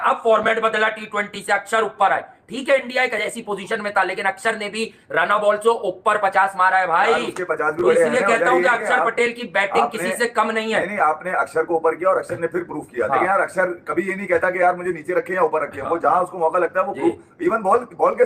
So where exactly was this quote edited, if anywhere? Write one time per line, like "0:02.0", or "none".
none